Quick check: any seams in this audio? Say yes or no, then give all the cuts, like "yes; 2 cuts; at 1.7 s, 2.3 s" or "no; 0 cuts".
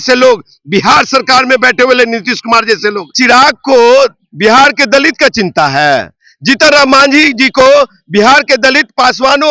yes; 1 cut; at 3.2 s